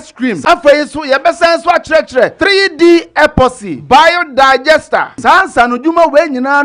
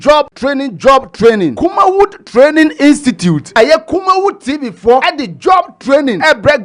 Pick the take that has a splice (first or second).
first